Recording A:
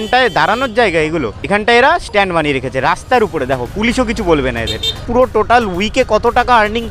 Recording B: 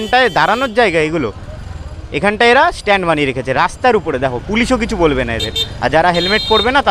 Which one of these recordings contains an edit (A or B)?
A